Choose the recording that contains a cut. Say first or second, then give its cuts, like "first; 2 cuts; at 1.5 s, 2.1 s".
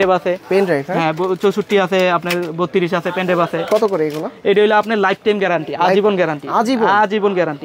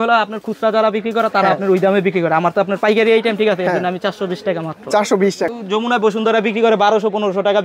second; 1 cut; at 5.5 s